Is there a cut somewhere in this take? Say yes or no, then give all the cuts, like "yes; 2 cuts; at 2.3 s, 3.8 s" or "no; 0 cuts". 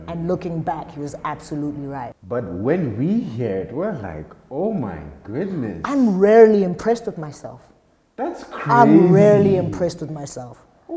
yes; 1 cut; at 2.2 s